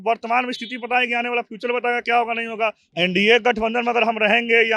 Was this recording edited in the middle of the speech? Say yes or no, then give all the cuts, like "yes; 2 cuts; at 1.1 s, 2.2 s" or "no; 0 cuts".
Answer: yes; 1 cut; at 2.8 s